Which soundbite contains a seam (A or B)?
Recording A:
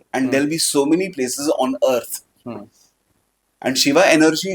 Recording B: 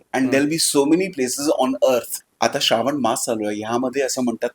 B